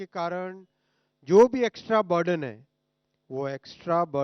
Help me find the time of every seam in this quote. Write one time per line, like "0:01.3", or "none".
none